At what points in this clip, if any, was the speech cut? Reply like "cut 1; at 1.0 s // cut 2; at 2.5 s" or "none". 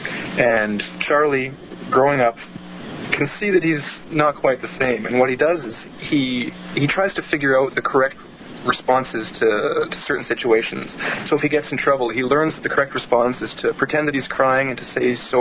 cut 1; at 4.4 s